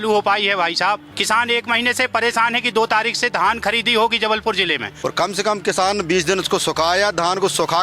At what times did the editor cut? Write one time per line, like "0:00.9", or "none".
0:01.1
0:04.9